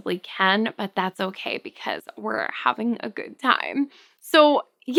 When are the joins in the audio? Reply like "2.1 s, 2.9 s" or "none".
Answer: none